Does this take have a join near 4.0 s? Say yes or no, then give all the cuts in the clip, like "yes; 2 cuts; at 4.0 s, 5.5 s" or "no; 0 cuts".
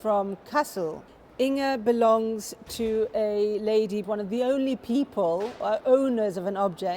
yes; 2 cuts; at 1.0 s, 4.0 s